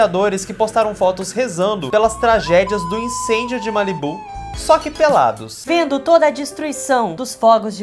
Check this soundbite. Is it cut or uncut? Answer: uncut